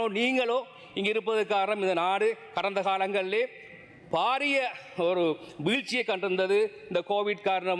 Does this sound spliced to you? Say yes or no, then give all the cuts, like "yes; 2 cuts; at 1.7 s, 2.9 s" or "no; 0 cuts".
no; 0 cuts